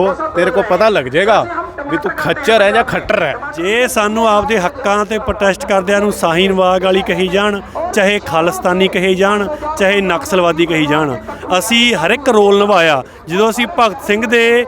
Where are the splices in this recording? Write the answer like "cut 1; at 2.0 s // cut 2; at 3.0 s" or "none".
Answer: cut 1; at 3.5 s